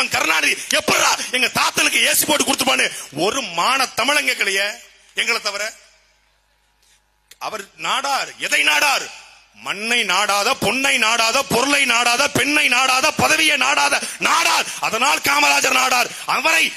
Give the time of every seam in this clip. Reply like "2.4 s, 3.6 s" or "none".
none